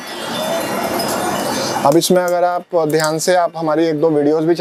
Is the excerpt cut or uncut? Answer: uncut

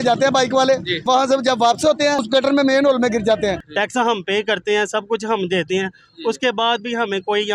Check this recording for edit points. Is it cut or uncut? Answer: cut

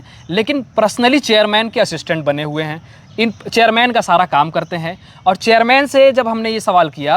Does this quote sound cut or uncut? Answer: uncut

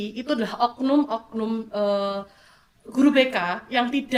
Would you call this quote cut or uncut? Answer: uncut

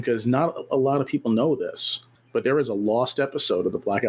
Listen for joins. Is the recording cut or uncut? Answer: uncut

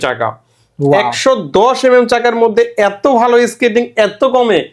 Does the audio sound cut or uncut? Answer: uncut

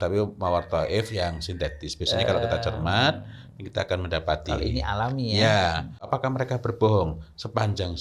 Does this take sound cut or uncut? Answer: cut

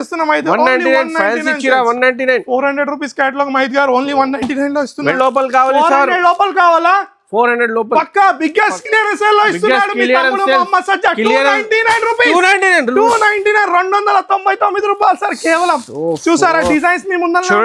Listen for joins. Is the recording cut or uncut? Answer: cut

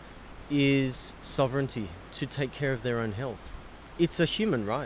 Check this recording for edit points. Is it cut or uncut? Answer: cut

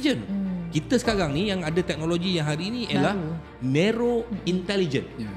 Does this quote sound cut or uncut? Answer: uncut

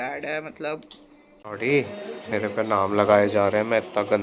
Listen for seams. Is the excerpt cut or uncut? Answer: cut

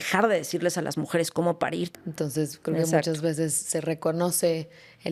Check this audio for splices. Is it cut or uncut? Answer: cut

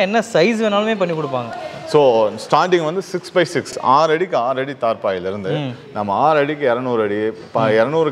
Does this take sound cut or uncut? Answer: uncut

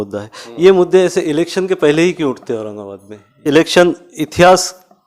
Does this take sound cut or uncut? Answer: cut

